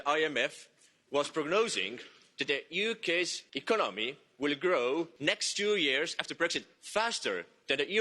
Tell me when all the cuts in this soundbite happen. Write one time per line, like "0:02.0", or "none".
0:03.5
0:05.1